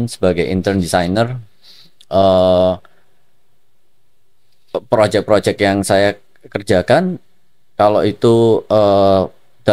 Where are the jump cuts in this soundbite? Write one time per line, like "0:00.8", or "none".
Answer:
none